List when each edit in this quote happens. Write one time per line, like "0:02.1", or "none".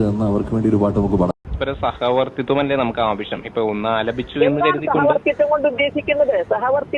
0:01.4